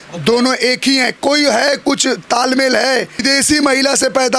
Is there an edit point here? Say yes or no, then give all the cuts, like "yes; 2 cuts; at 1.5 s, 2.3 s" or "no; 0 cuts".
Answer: yes; 1 cut; at 3.2 s